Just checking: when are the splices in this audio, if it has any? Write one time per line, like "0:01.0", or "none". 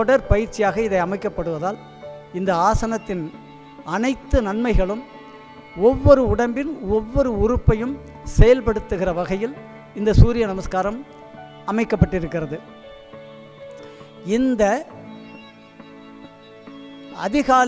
0:12.6
0:14.2